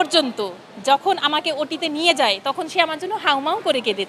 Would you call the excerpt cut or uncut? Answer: uncut